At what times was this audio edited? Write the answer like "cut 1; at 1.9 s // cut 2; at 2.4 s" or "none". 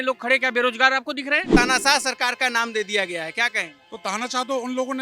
cut 1; at 1.5 s

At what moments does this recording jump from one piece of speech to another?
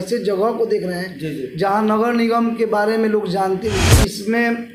cut 1; at 3.8 s

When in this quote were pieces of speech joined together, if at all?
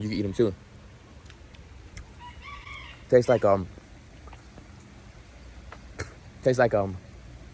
none

